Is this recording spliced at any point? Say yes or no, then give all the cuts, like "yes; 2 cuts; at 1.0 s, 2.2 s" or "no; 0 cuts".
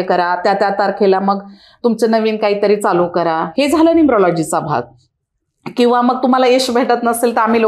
no; 0 cuts